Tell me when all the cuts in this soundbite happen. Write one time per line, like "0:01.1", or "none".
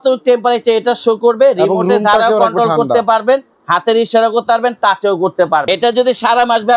0:05.7

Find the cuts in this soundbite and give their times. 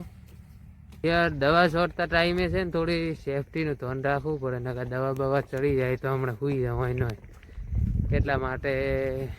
0:01.0

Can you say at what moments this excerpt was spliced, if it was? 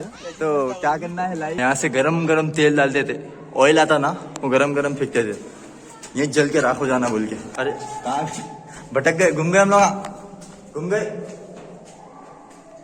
0:01.6
0:07.5

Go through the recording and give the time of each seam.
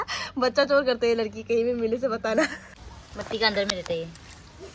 0:02.6

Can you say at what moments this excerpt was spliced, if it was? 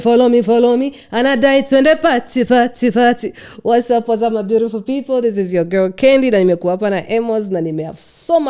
none

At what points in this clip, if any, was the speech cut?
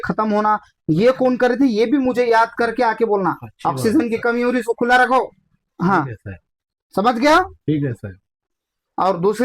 none

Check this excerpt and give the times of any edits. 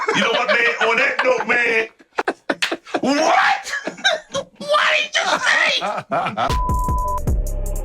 0:02.2
0:06.5

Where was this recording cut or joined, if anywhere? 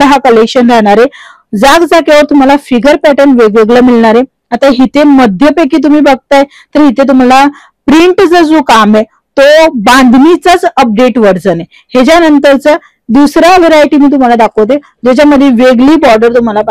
none

